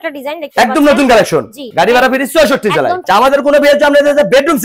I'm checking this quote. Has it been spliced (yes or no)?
yes